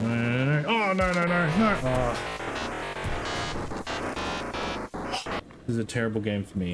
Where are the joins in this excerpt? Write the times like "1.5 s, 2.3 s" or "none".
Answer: 5.4 s